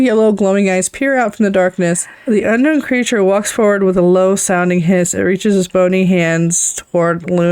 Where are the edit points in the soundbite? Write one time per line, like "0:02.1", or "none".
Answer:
0:02.1

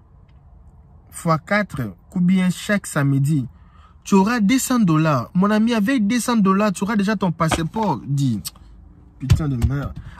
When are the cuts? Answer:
none

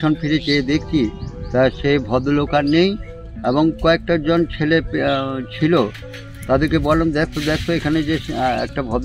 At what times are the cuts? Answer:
none

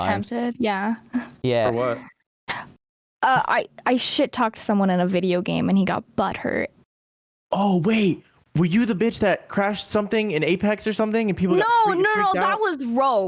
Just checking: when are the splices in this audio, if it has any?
none

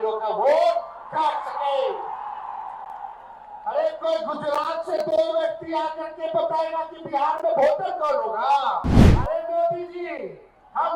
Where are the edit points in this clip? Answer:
0:09.0

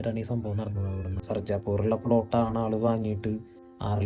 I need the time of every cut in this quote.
0:01.2

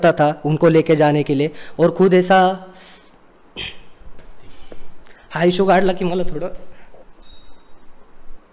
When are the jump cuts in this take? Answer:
none

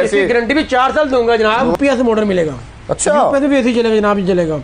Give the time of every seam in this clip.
0:01.7

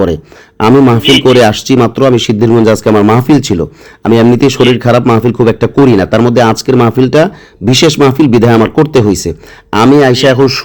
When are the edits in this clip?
none

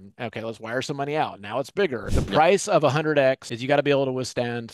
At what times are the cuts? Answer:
0:02.1
0:03.5

